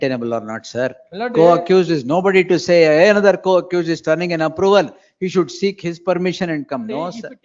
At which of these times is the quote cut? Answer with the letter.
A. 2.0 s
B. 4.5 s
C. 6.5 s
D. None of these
D